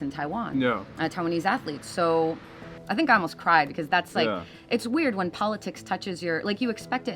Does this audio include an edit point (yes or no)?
yes